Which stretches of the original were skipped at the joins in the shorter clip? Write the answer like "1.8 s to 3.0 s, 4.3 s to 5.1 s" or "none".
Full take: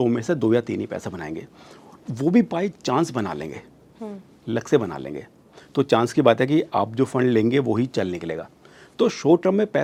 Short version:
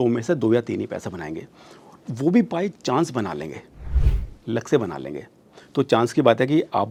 none